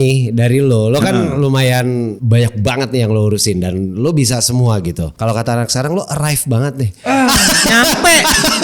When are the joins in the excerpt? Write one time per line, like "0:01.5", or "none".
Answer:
0:02.2
0:05.1